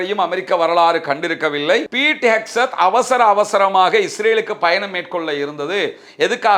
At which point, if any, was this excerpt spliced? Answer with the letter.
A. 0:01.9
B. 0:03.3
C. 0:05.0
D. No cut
A